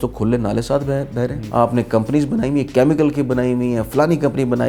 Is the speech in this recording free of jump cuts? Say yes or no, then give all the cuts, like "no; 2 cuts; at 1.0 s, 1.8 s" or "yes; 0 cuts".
no; 1 cut; at 1.4 s